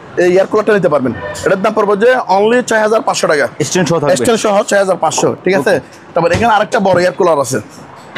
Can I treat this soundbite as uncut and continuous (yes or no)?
yes